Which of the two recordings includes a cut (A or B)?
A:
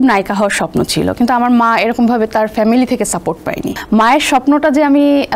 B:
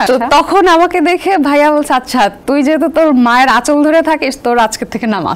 A